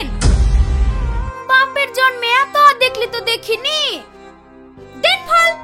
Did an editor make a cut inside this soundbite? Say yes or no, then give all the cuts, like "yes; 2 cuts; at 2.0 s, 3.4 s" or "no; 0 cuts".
no; 0 cuts